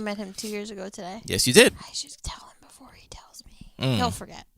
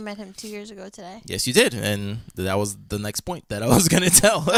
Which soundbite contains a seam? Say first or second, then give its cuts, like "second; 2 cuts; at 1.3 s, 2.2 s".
first; 1 cut; at 1.8 s